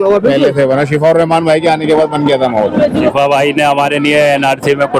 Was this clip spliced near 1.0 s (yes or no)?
no